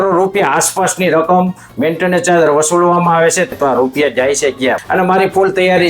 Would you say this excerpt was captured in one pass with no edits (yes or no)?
no